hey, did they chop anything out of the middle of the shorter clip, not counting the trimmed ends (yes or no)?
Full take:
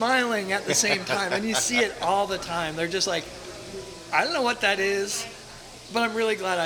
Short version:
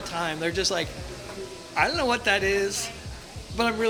no